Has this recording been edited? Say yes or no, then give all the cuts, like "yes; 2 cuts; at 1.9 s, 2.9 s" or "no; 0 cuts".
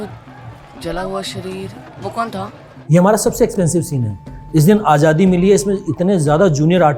yes; 1 cut; at 2.7 s